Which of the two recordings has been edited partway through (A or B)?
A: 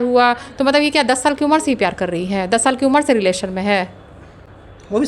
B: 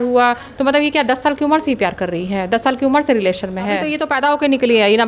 B